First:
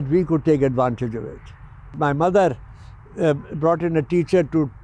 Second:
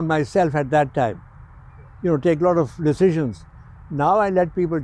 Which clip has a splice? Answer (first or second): first